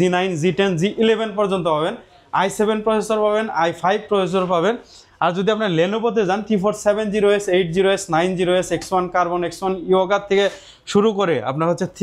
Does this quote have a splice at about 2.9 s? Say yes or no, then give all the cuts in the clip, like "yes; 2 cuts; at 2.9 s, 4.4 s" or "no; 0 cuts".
no; 0 cuts